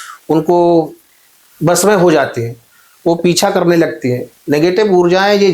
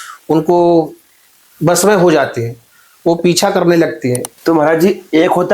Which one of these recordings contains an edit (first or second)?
second